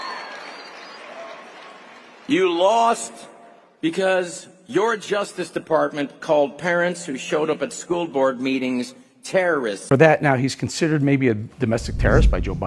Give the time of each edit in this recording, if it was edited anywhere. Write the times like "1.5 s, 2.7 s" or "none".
9.9 s